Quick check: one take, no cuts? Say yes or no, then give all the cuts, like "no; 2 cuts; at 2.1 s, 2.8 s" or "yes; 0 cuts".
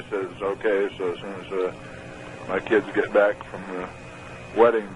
no; 1 cut; at 3.5 s